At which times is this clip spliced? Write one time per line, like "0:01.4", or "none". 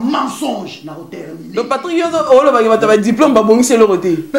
none

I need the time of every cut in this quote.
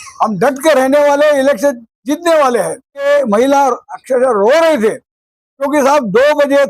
0:03.0

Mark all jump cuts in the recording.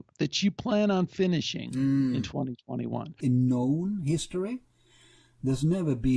0:03.1

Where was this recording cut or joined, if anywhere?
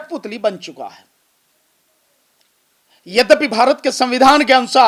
none

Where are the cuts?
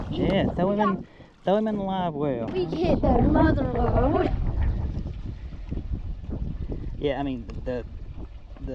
0:02.6

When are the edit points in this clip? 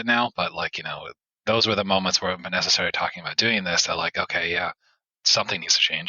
0:05.2

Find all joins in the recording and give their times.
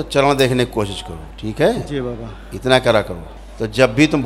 0:03.3

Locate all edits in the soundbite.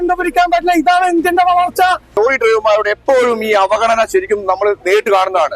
0:02.1

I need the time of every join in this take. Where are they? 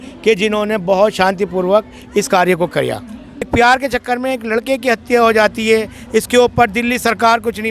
0:03.4

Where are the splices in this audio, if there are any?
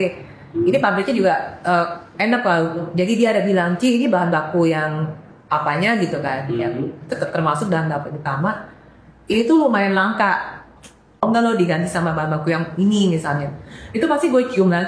0:11.2

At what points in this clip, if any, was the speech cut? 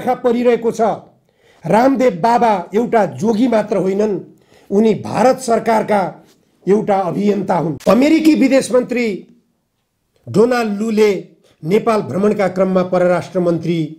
0:07.7

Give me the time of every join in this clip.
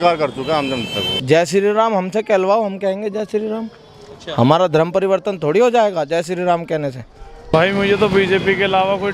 0:01.1
0:07.3

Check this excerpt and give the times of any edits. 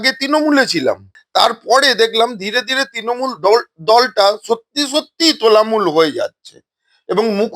0:01.1

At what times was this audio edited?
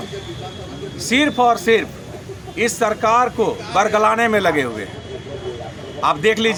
none

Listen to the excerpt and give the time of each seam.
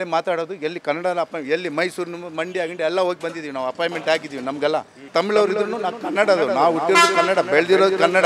0:05.1

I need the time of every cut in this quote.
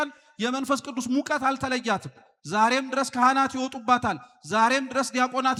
none

